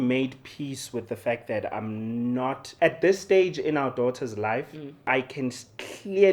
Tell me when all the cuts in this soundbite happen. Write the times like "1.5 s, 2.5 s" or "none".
2.7 s, 5.1 s